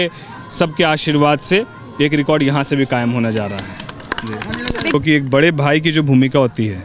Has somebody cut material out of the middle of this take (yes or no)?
yes